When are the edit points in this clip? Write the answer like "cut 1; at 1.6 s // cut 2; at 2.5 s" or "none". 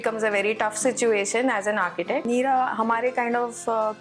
cut 1; at 2.2 s